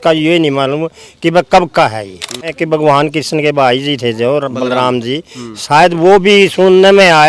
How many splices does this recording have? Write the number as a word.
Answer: one